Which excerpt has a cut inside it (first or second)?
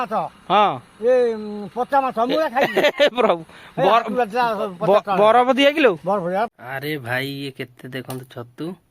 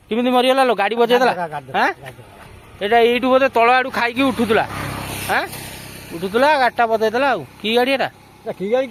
first